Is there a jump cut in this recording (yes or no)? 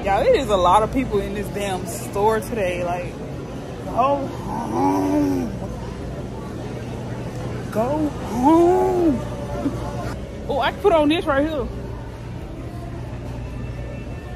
yes